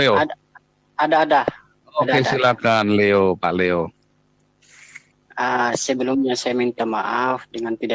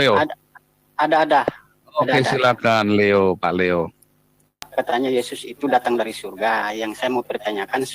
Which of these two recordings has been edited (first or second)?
second